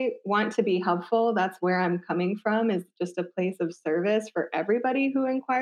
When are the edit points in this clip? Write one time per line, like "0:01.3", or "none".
none